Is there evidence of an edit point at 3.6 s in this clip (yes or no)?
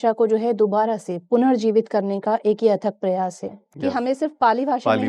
yes